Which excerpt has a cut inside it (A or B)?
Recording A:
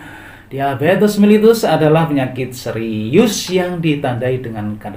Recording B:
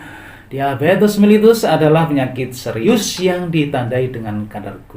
B